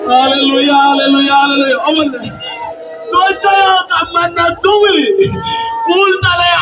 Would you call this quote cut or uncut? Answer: uncut